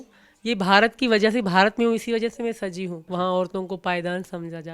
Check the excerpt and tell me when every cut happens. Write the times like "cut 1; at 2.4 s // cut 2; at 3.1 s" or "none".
cut 1; at 2.9 s

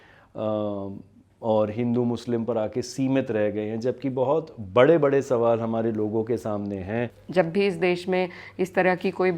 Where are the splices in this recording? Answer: cut 1; at 7.2 s

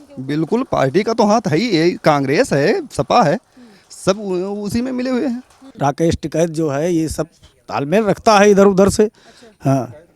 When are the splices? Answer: cut 1; at 5.7 s

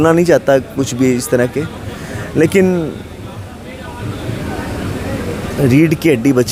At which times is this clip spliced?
none

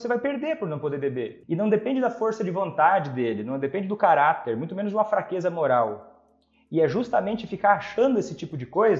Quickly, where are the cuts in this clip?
cut 1; at 1.4 s

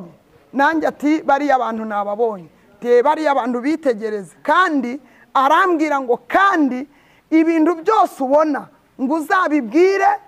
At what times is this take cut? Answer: none

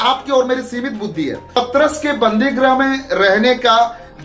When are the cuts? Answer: cut 1; at 1.6 s

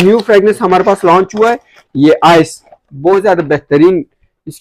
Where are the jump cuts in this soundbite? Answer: none

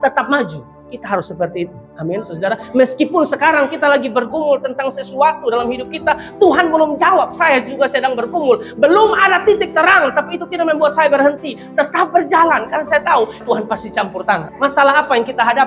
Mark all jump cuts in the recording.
cut 1; at 13.4 s // cut 2; at 14.5 s

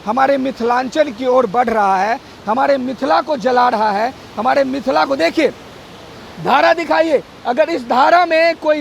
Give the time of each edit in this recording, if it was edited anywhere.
none

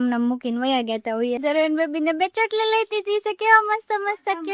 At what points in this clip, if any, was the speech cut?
cut 1; at 1.4 s

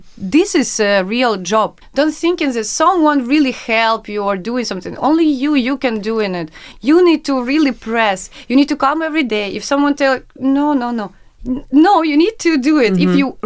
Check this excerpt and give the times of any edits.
cut 1; at 1.8 s // cut 2; at 6.6 s

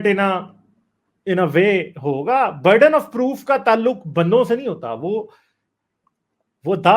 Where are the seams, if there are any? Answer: none

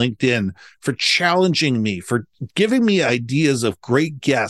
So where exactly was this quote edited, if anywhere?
none

